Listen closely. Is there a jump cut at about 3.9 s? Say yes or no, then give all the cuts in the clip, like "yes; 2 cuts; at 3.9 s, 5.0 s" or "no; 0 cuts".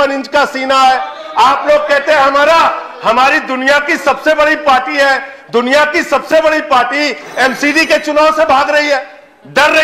no; 0 cuts